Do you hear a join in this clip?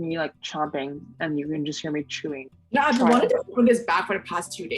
yes; 1 cut; at 2.4 s

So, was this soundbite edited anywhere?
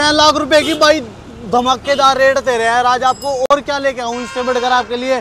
no; 0 cuts

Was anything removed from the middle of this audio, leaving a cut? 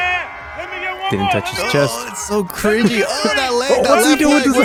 no; 0 cuts

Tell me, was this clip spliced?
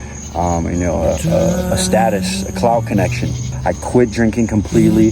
yes; 1 cut; at 3.4 s

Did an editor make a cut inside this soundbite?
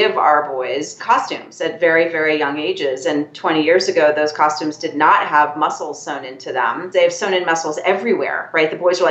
yes; 2 cuts; at 1.0 s, 6.8 s

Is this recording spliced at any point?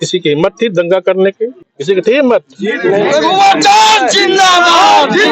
yes; 1 cut; at 1.7 s

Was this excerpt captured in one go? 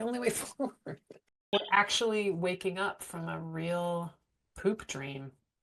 no; 1 cut; at 1.5 s

